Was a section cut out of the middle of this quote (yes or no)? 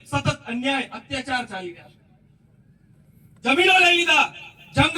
yes